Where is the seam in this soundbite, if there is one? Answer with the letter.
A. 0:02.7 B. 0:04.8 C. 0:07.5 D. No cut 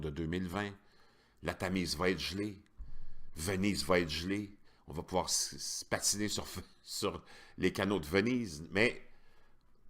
B